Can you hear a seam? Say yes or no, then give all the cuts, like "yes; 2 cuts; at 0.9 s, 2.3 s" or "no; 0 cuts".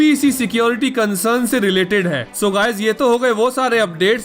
yes; 1 cut; at 2.2 s